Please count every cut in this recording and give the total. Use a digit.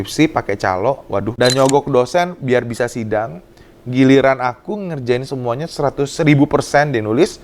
1